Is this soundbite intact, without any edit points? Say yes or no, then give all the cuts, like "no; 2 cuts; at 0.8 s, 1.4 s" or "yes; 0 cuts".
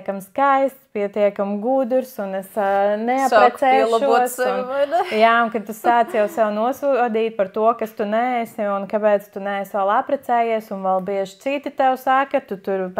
yes; 0 cuts